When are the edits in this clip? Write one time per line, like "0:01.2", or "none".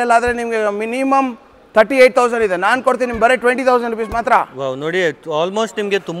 none

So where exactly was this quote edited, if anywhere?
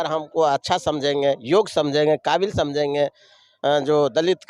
none

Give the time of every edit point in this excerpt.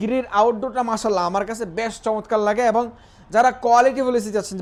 none

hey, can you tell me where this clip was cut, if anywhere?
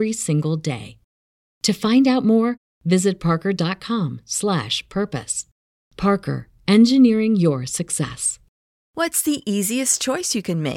0:08.9

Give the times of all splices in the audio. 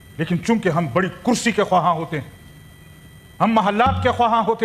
none

